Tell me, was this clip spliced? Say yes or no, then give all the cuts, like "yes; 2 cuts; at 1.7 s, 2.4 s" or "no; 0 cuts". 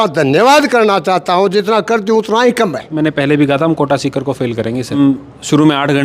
yes; 2 cuts; at 2.9 s, 5.0 s